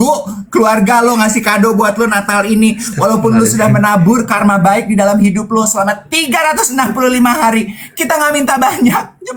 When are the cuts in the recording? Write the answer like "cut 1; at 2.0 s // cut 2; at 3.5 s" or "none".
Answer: none